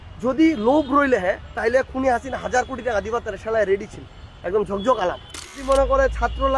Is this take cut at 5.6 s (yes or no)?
yes